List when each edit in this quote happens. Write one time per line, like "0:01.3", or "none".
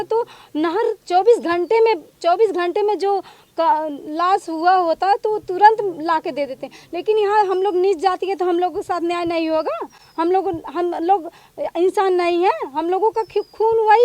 none